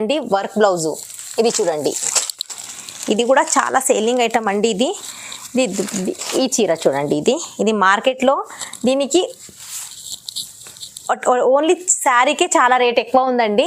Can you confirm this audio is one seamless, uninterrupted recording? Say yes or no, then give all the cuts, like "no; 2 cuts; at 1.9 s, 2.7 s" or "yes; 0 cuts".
yes; 0 cuts